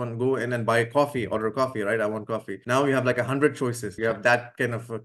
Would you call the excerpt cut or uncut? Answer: cut